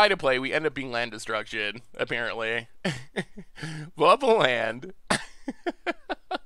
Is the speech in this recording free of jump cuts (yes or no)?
yes